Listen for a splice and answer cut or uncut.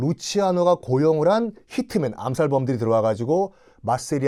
uncut